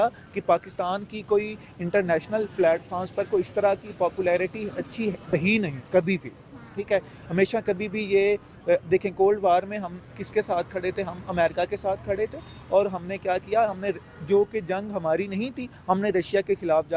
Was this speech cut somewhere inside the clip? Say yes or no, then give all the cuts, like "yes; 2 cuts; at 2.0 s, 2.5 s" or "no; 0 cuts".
no; 0 cuts